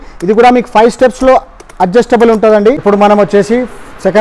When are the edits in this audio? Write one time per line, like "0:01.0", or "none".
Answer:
0:02.8